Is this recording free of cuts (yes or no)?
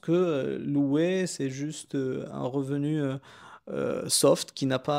yes